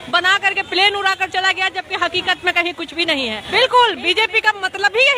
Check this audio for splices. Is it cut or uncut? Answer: cut